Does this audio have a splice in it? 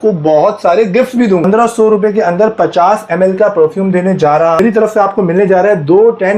yes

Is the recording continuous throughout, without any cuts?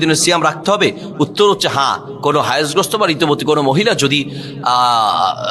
yes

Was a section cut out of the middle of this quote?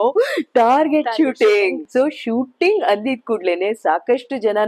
yes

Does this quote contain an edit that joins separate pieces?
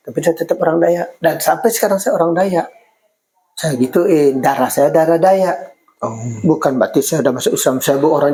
no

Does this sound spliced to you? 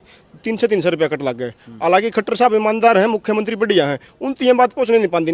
no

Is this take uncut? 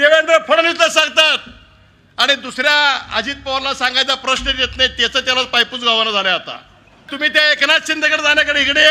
no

